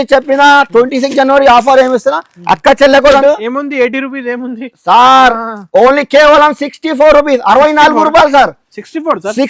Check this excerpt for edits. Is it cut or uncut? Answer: cut